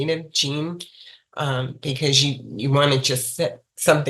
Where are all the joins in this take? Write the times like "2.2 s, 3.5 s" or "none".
none